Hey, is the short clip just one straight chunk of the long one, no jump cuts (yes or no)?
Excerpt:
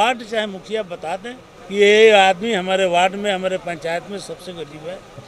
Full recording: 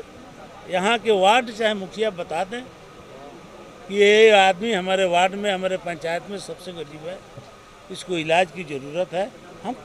no